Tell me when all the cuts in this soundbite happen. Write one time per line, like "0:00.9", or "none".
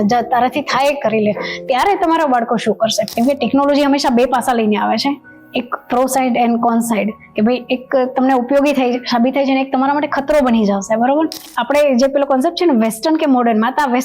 0:03.0
0:11.5